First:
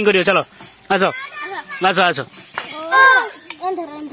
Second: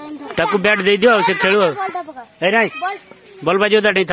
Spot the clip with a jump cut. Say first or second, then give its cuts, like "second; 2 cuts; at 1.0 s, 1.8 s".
first; 1 cut; at 2.9 s